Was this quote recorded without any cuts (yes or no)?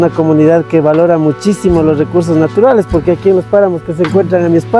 yes